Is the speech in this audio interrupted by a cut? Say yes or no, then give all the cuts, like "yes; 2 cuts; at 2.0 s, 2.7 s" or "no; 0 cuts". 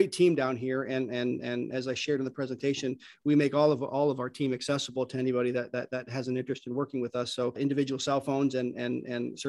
no; 0 cuts